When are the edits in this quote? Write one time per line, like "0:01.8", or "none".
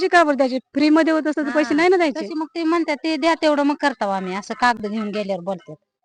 none

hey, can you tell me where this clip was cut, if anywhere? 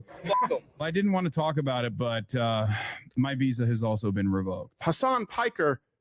0:00.8
0:04.7

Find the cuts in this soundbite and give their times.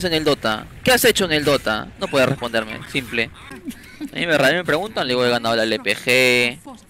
none

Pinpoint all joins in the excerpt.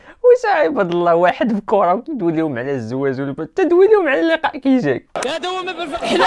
0:05.2

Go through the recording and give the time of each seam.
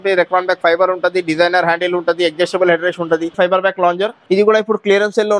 0:03.3
0:04.2

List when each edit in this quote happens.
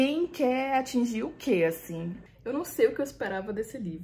0:02.2

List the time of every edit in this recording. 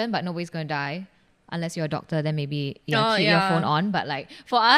none

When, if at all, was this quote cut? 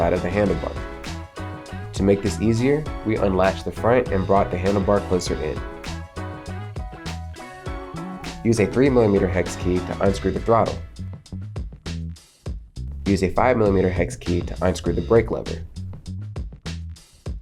0:05.6
0:08.4
0:10.8
0:12.5
0:15.5

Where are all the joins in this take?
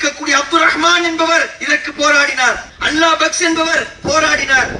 0:02.7

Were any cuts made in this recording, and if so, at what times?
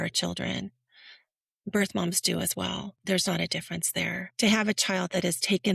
0:02.9
0:04.2

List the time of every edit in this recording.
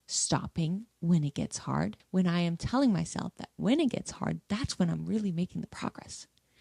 0:02.0

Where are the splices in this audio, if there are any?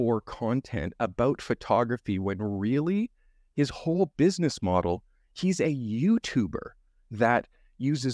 none

